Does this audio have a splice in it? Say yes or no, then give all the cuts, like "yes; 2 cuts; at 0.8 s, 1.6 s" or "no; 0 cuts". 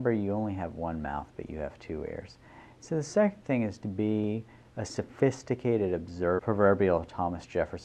no; 0 cuts